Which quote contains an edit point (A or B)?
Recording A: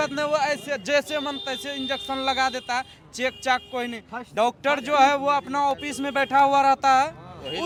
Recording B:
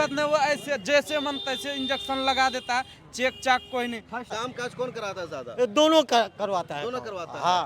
B